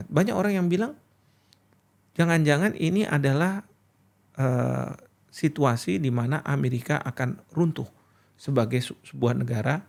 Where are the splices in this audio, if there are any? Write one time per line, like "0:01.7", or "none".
none